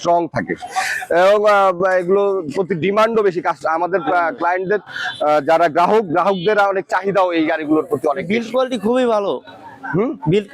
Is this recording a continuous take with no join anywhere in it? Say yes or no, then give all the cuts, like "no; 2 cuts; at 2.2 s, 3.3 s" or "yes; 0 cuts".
yes; 0 cuts